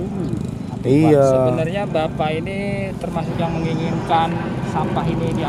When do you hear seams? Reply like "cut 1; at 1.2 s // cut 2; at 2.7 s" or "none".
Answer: none